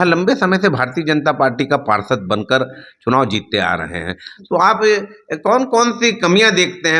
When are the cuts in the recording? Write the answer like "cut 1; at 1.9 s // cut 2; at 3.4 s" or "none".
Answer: none